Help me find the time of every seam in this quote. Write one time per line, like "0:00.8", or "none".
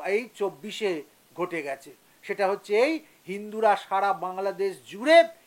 none